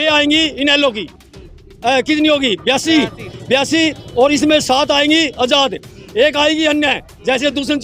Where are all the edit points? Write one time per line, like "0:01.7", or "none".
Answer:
none